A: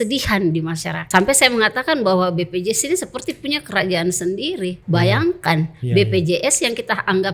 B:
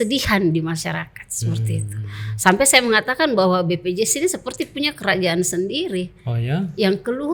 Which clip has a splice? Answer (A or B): A